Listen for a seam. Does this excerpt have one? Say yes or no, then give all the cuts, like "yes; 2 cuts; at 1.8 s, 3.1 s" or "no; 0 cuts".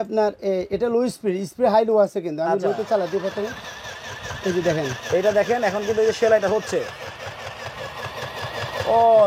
no; 0 cuts